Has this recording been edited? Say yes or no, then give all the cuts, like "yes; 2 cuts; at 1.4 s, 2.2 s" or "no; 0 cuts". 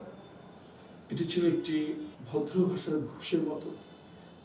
yes; 1 cut; at 2.1 s